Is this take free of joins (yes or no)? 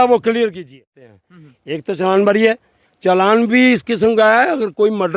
no